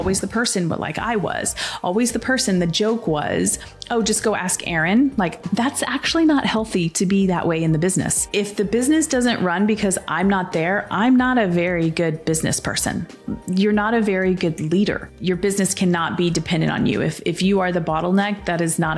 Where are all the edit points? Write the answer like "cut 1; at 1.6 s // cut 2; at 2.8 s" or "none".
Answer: cut 1; at 5.4 s // cut 2; at 8.2 s // cut 3; at 15.1 s